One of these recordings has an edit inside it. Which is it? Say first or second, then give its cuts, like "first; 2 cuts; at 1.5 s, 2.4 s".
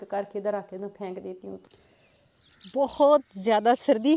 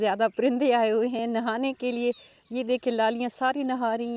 first; 1 cut; at 1.6 s